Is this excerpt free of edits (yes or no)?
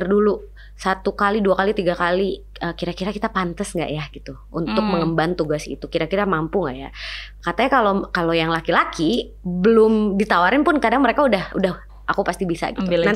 yes